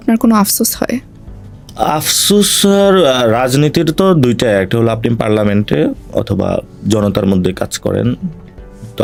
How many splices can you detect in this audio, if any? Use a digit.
0